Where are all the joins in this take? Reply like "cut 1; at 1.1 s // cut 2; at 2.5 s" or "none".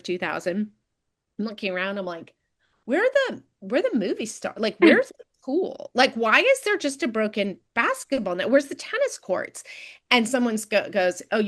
none